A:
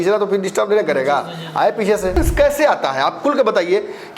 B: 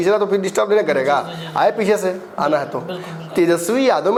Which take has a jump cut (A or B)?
A